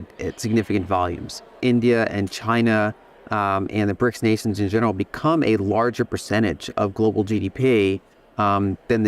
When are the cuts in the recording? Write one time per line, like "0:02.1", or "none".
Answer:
0:01.5